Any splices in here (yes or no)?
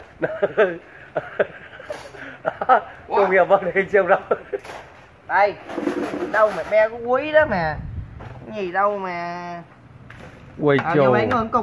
yes